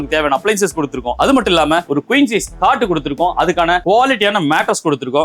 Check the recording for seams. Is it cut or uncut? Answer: cut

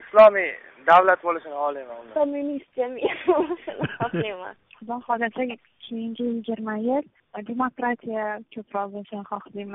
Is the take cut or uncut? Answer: uncut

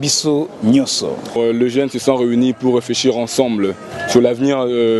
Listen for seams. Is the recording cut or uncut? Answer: cut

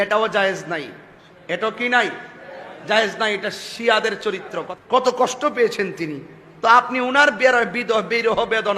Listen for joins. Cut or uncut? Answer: cut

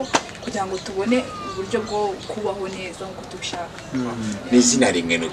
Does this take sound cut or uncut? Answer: cut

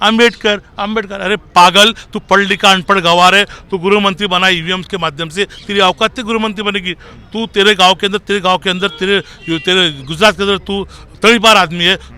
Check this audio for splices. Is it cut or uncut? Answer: uncut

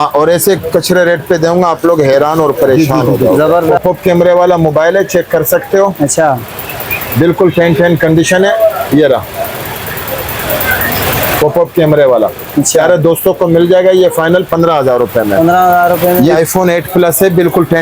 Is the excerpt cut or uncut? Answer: cut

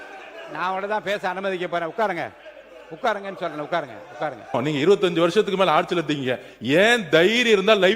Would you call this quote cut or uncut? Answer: cut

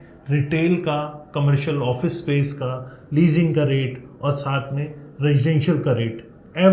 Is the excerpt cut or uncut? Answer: uncut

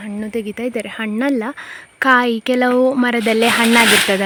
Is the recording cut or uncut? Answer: uncut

